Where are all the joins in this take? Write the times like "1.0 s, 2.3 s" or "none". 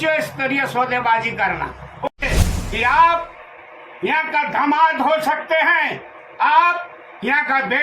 2.2 s